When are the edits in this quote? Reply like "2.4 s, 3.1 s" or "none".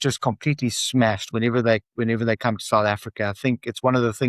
none

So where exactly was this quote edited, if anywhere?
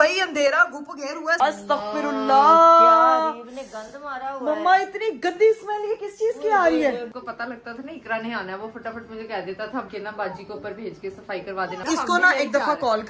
1.4 s, 7.1 s, 9.9 s, 11.8 s

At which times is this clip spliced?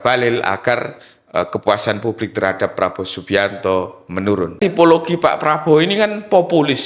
4.5 s

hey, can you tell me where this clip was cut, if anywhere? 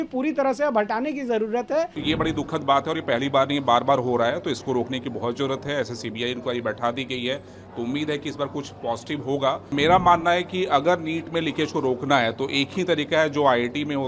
2.0 s, 9.7 s

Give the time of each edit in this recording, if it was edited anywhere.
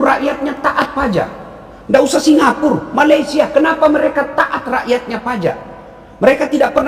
none

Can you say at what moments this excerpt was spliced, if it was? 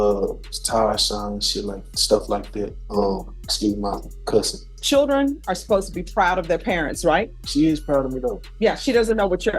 2.8 s, 4.8 s, 7.4 s, 8.4 s

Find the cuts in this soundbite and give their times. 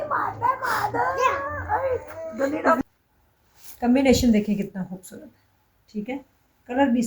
2.8 s

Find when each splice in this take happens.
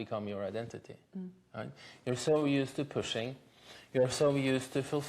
none

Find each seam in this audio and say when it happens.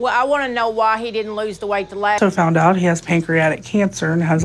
2.2 s

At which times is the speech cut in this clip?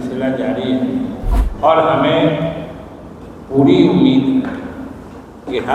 1.4 s

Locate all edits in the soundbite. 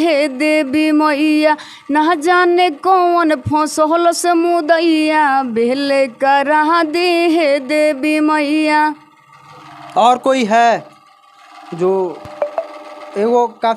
none

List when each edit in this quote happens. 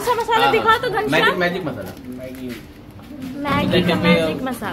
none

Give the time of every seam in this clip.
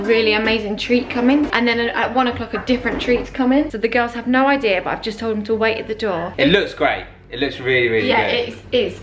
1.5 s, 3.7 s, 6.3 s

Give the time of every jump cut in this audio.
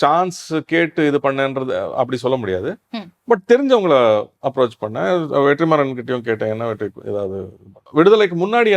7.8 s

